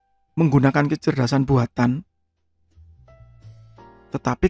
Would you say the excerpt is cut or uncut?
uncut